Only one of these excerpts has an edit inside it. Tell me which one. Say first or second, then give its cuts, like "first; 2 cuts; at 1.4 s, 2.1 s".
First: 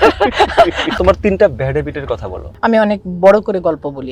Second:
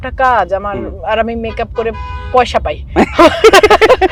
first; 2 cuts; at 0.9 s, 2.6 s